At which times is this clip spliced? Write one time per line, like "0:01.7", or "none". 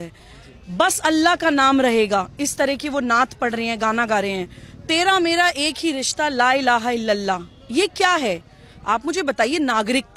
none